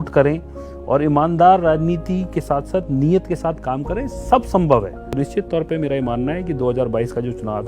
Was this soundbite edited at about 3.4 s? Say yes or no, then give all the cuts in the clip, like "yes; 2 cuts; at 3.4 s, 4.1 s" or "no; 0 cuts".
no; 1 cut; at 5.0 s